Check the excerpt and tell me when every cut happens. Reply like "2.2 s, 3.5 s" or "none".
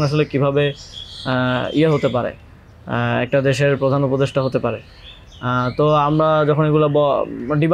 none